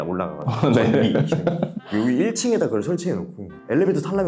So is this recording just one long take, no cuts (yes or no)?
no